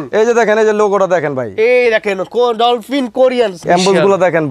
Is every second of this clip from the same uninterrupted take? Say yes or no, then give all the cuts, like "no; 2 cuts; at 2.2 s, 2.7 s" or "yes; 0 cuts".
no; 1 cut; at 3.6 s